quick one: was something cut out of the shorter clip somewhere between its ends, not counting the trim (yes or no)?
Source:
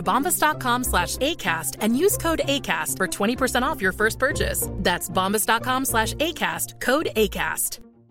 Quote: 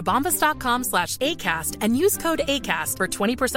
no